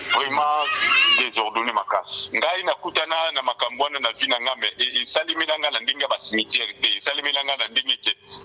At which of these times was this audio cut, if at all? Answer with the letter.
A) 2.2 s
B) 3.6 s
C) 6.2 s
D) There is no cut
A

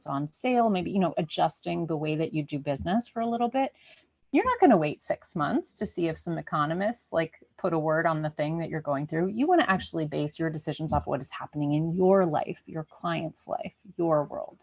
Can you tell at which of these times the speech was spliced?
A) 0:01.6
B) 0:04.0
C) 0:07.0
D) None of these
D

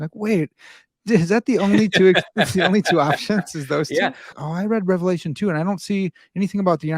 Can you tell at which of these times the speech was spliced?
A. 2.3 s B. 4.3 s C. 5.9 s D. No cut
B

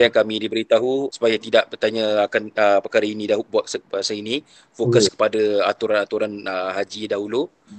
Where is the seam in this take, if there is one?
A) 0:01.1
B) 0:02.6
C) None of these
A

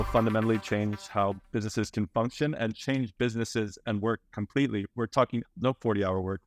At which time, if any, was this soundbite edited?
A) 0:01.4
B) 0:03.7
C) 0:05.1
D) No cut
C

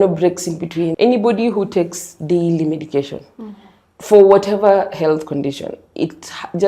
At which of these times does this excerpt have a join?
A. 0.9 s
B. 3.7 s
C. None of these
A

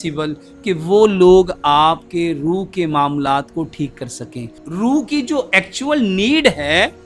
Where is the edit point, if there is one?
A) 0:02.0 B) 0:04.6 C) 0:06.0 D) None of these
B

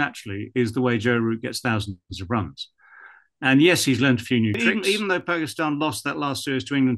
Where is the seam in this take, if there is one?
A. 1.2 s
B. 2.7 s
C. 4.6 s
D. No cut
C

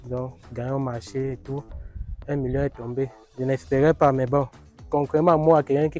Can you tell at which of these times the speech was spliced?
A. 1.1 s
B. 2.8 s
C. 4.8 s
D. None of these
C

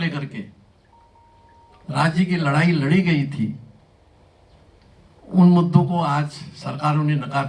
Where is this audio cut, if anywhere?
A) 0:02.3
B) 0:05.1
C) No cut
C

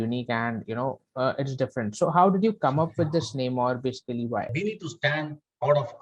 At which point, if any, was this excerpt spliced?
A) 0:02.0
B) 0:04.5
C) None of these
B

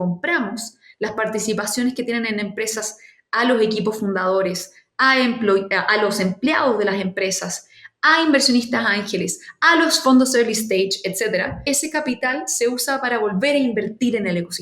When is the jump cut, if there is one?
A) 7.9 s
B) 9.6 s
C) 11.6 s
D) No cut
C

